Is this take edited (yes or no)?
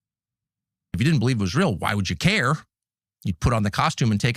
yes